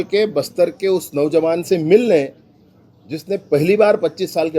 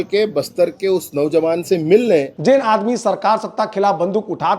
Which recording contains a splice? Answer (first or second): second